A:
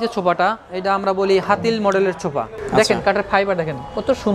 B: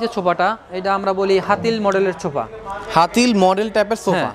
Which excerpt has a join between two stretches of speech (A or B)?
A